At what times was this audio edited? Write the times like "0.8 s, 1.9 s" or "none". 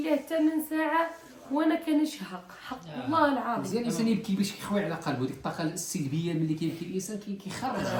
none